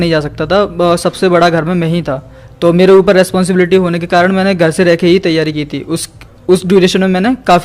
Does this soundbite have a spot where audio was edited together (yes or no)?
no